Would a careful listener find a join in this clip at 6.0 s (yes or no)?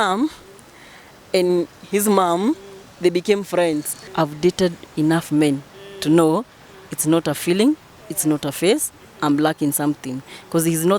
no